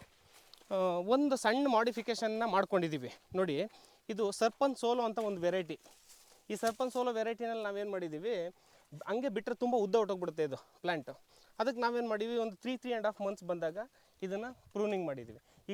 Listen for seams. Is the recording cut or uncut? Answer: uncut